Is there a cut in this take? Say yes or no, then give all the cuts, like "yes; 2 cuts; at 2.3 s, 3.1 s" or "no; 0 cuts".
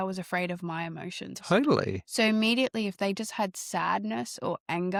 no; 0 cuts